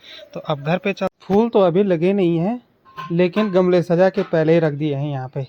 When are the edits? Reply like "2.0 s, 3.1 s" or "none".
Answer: 1.1 s